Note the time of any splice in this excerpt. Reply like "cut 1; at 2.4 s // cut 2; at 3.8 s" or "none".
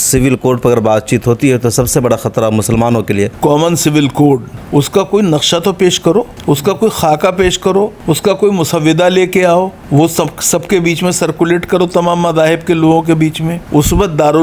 cut 1; at 3.3 s // cut 2; at 4.5 s // cut 3; at 6.3 s // cut 4; at 8.0 s // cut 5; at 9.8 s // cut 6; at 13.5 s

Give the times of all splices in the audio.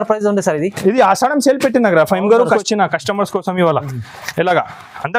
cut 1; at 2.6 s

